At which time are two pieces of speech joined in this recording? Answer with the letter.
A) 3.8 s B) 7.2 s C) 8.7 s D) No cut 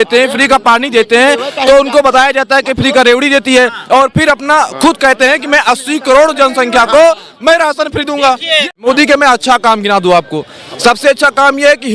C